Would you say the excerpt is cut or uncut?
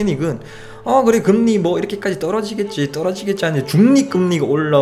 uncut